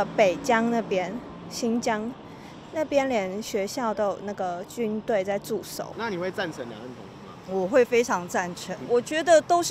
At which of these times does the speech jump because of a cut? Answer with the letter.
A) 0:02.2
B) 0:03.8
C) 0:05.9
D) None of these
C